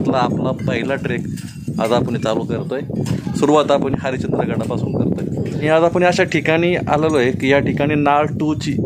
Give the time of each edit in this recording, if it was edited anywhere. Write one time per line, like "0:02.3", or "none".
0:03.2
0:05.6